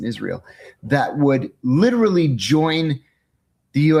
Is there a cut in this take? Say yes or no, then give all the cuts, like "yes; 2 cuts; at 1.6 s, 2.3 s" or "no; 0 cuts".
no; 0 cuts